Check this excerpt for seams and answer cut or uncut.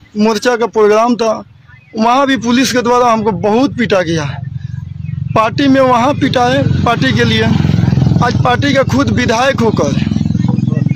uncut